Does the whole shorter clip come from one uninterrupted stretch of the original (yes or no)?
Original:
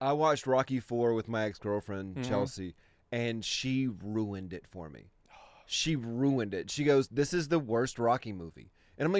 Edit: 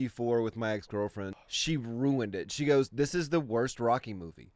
no